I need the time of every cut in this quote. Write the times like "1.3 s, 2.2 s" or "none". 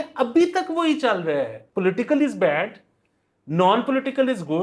1.6 s